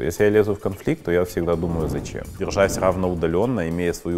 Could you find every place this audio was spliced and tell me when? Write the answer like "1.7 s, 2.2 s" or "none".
2.4 s